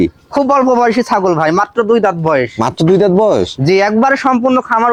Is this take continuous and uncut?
yes; 0 cuts

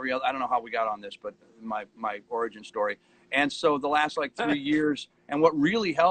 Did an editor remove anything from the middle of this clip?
no; 0 cuts

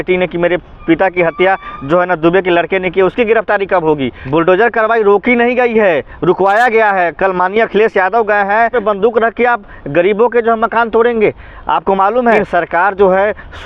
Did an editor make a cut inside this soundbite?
yes; 3 cuts; at 4.2 s, 8.8 s, 12.4 s

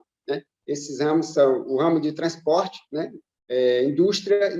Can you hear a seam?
no; 0 cuts

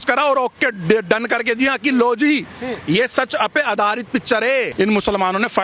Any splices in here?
yes; 1 cut; at 4.7 s

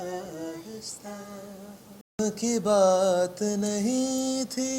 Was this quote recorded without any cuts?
no; 1 cut; at 2.2 s

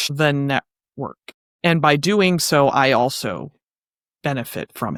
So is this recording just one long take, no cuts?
yes; 0 cuts

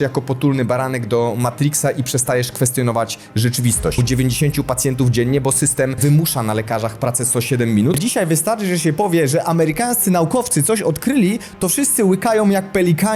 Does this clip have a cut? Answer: yes; 3 cuts; at 4.0 s, 6.0 s, 8.0 s

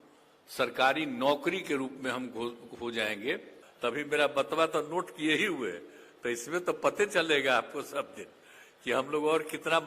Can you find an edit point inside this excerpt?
yes; 1 cut; at 3.6 s

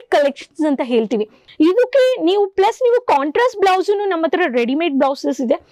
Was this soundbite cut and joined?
yes; 1 cut; at 1.4 s

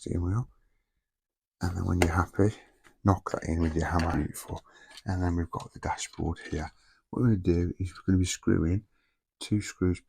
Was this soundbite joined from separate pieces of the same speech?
yes; 1 cut; at 4.1 s

